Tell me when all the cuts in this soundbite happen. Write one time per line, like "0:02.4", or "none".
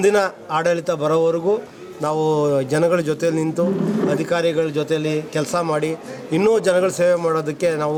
none

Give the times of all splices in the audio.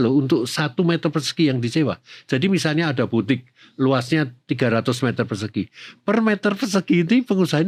none

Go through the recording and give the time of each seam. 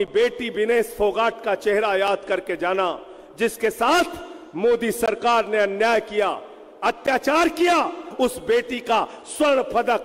0:08.1

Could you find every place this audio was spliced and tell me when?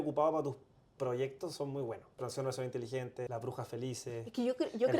0:02.2
0:03.3

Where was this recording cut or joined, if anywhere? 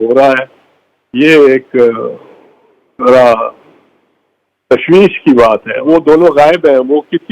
0:05.7

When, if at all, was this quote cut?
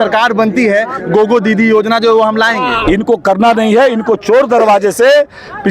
0:02.7

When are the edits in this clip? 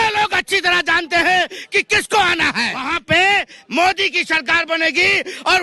0:03.0

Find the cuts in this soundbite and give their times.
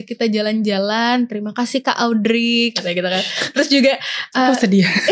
none

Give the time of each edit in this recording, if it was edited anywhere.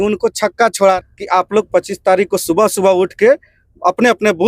0:01.0

